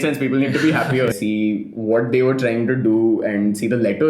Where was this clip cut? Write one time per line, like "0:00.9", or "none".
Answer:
0:01.1